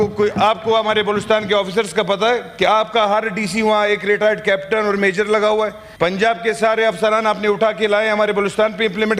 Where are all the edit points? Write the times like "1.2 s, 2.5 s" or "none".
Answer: 5.8 s